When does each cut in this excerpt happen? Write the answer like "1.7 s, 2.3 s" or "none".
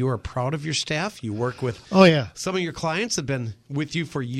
none